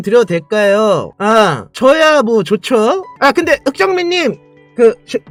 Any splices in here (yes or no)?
no